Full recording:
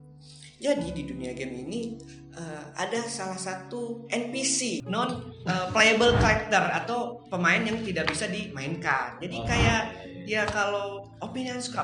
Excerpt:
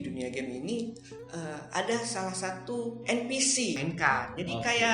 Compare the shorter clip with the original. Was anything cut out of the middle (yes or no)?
yes